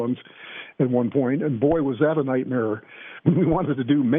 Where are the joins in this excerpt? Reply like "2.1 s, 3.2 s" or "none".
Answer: none